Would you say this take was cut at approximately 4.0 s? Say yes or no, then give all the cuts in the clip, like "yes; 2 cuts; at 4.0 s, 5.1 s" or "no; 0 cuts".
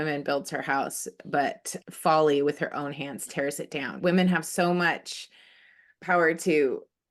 yes; 1 cut; at 4.0 s